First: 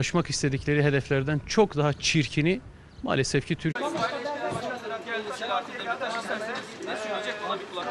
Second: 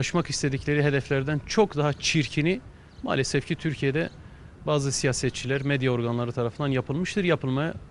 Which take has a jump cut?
second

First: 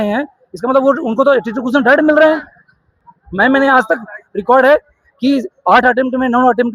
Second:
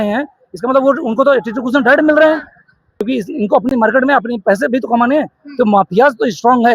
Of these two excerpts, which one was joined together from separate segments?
second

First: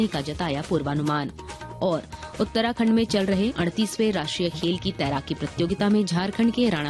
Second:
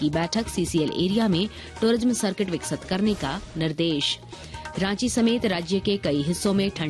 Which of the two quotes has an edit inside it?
first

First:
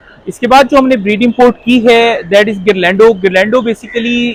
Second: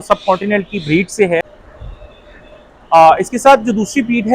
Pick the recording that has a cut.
second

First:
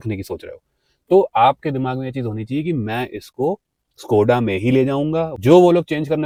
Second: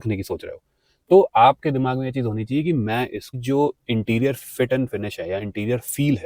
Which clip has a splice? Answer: second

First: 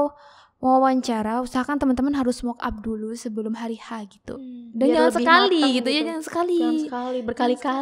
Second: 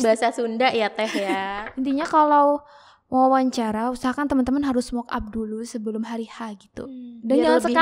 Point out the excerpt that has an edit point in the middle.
second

